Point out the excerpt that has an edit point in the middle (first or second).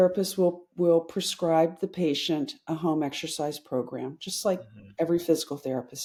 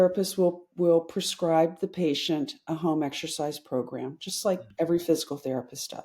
second